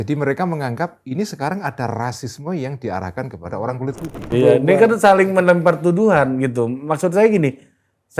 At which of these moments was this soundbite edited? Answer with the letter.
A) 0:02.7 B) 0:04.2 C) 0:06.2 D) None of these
B